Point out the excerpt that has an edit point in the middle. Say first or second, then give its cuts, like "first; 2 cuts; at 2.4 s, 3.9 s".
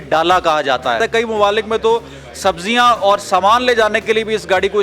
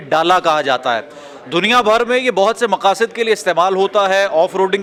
first; 1 cut; at 1.0 s